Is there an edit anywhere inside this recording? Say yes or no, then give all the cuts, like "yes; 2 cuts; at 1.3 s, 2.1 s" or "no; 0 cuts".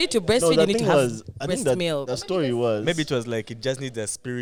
no; 0 cuts